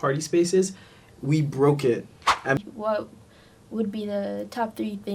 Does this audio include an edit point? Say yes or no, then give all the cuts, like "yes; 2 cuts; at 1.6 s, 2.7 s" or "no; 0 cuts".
yes; 1 cut; at 2.6 s